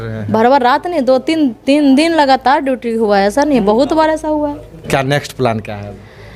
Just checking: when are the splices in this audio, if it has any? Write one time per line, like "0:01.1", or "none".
0:04.9